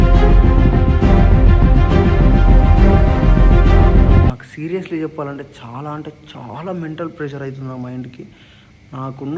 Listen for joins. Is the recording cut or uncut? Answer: cut